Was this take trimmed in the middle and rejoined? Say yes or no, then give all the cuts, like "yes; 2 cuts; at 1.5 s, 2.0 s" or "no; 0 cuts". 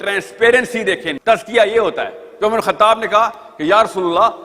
yes; 1 cut; at 1.1 s